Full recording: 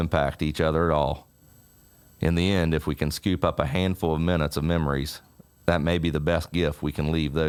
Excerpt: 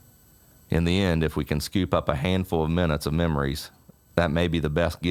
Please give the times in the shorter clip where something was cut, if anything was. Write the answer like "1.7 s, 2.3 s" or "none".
none